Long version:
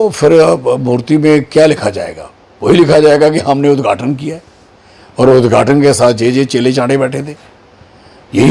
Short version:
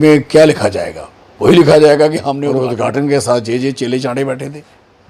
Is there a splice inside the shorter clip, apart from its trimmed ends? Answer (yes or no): yes